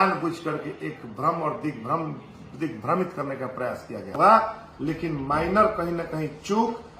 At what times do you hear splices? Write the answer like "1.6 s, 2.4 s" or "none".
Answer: 4.1 s